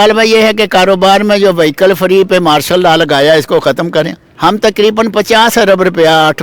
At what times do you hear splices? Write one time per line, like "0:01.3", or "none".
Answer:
0:04.2